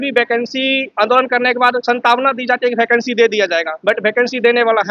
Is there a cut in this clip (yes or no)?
yes